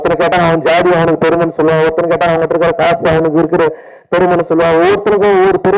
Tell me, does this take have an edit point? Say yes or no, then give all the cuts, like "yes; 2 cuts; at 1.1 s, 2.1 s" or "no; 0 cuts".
no; 0 cuts